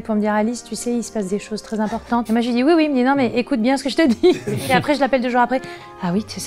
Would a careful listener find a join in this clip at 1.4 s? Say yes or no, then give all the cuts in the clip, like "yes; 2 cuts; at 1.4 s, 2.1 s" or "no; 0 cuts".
no; 0 cuts